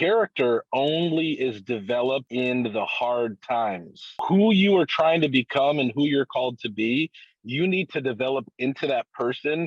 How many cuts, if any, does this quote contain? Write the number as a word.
one